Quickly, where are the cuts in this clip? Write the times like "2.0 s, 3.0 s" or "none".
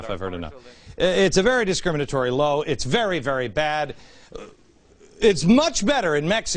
2.5 s